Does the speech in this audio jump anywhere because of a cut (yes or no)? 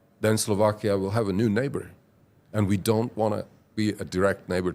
no